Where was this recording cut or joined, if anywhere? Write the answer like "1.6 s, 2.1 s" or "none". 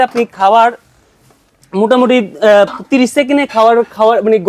none